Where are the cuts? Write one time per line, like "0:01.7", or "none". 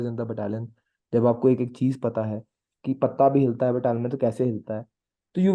none